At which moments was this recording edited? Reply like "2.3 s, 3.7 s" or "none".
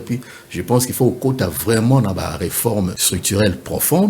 3.1 s